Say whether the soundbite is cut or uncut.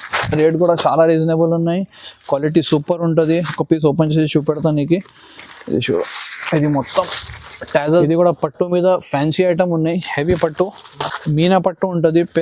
cut